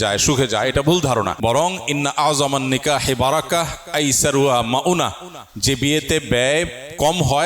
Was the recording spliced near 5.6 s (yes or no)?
no